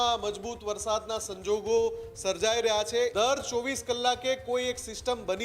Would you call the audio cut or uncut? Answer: cut